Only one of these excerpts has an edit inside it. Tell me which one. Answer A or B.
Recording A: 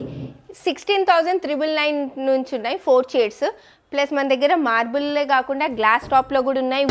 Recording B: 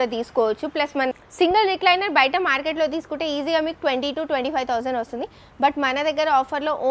B